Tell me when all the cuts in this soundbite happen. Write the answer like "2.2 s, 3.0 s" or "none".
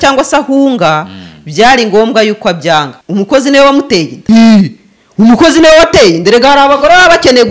3.0 s, 4.2 s